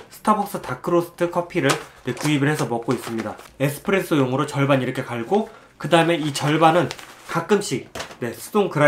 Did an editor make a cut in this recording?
yes; 1 cut; at 3.5 s

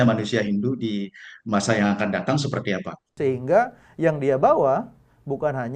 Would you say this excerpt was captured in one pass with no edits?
no; 1 cut; at 3.1 s

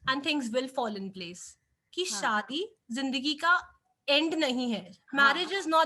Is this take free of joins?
no; 1 cut; at 1.8 s

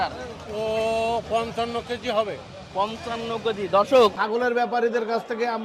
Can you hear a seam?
yes; 1 cut; at 4.2 s

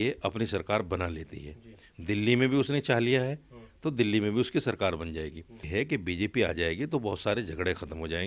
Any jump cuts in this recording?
yes; 1 cut; at 5.6 s

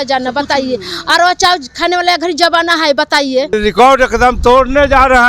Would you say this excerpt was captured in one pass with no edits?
no; 1 cut; at 3.5 s

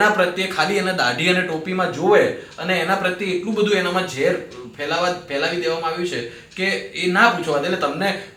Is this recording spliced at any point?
no; 0 cuts

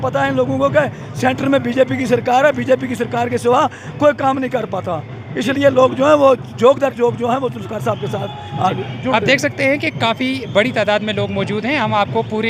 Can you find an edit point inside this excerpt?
no; 0 cuts

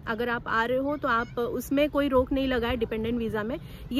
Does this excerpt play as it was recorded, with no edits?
yes; 0 cuts

